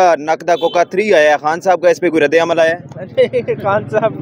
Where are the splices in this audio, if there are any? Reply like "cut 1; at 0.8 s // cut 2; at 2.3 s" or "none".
none